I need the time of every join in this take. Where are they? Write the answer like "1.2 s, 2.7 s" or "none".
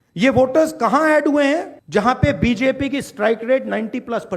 1.8 s

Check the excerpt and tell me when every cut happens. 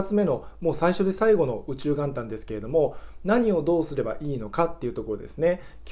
none

